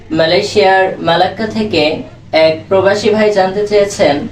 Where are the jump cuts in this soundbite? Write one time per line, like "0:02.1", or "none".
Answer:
0:02.1